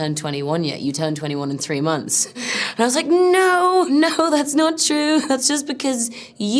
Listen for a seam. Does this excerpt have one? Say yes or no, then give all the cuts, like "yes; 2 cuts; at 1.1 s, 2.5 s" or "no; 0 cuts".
yes; 1 cut; at 3.9 s